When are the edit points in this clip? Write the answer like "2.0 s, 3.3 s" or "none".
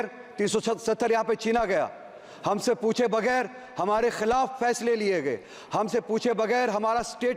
none